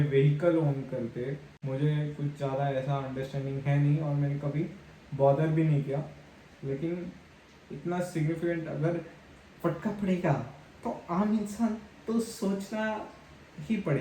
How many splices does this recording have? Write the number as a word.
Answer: one